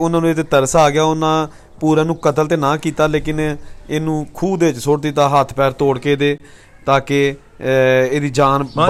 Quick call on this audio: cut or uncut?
uncut